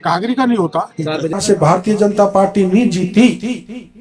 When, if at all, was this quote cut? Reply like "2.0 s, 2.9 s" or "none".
1.4 s